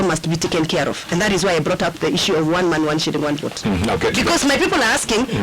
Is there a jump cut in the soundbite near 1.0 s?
no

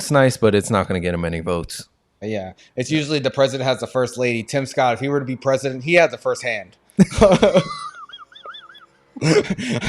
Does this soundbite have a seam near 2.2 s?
yes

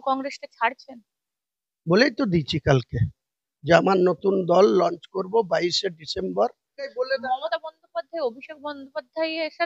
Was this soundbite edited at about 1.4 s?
no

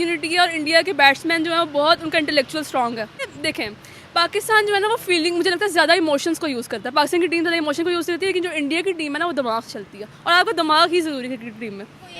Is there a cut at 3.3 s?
yes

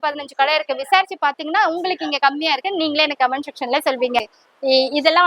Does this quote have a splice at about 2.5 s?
no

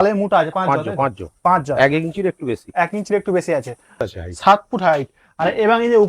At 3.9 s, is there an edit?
yes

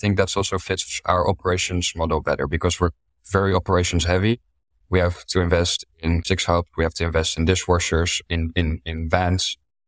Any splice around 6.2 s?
yes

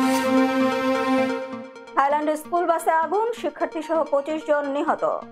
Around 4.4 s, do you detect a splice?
no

